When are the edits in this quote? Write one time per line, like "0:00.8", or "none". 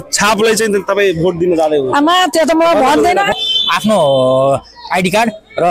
0:03.3